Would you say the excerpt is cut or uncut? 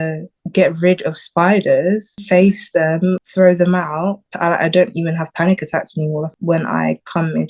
cut